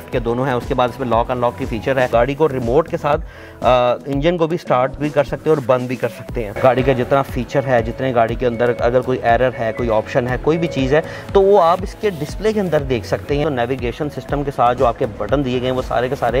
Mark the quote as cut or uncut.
cut